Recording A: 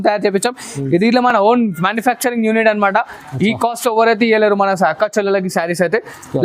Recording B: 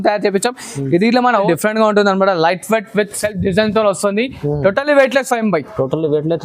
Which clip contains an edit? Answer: B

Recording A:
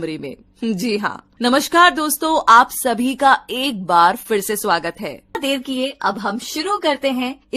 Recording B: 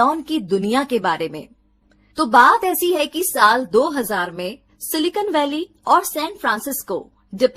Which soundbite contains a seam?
A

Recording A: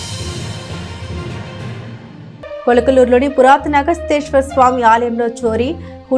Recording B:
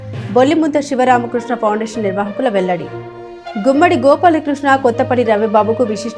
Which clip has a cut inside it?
A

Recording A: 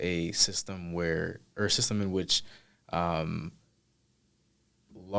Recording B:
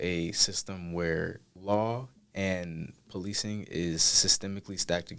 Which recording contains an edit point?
B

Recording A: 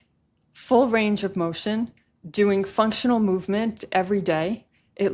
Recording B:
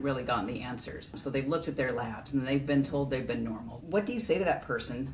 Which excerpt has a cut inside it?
B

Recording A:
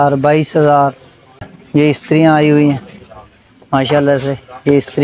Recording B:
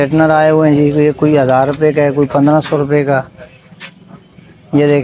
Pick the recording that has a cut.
A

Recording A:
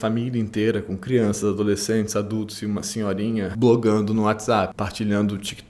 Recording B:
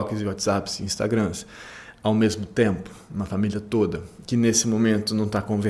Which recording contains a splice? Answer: A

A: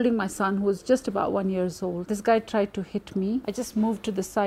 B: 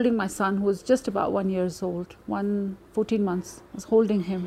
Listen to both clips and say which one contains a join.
A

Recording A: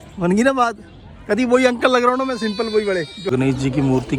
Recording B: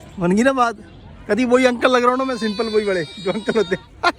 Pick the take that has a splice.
A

